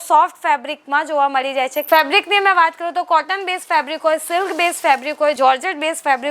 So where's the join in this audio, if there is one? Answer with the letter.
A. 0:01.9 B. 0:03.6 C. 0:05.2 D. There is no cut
A